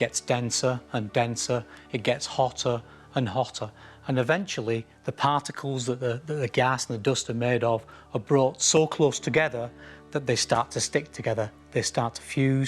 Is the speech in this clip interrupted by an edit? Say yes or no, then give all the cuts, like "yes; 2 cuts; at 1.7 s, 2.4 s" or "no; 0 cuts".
yes; 1 cut; at 6.3 s